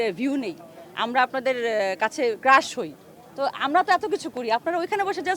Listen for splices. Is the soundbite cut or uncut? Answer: uncut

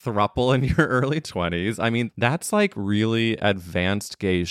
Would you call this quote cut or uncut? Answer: cut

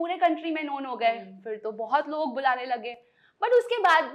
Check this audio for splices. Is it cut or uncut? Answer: uncut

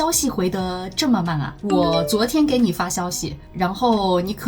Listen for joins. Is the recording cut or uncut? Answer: cut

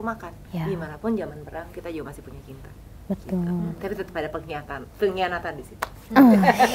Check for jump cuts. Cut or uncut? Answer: uncut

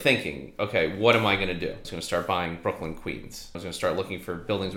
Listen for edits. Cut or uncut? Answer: cut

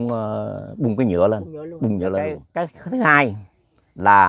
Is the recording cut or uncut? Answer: cut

